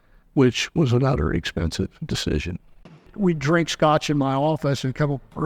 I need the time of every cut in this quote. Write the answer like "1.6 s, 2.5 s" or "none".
3.1 s